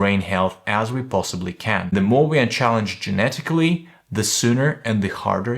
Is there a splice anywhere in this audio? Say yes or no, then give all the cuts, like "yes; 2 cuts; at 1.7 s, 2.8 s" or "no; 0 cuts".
yes; 1 cut; at 1.9 s